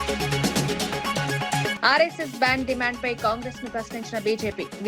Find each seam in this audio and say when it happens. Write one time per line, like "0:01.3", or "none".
0:01.7